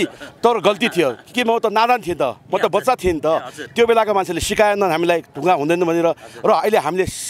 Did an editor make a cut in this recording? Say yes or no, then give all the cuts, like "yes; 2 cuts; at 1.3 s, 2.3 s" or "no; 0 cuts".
no; 0 cuts